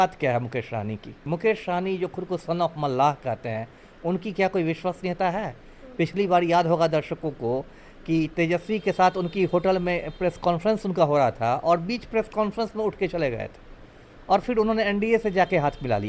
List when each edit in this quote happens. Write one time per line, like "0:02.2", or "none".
0:01.2